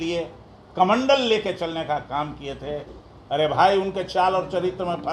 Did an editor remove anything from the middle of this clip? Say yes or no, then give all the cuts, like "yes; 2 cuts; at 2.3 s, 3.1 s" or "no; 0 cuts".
yes; 1 cut; at 3.1 s